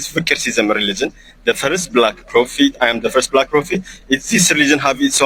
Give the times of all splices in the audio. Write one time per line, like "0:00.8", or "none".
none